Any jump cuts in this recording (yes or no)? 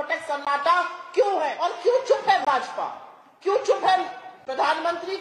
yes